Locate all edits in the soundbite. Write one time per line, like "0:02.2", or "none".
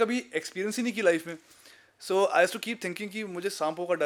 none